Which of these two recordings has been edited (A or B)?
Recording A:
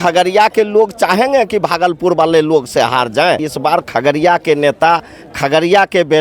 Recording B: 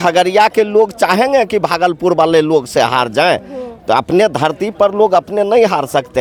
A